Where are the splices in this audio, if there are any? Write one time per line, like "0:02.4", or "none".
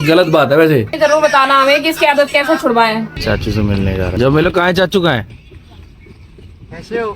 0:03.1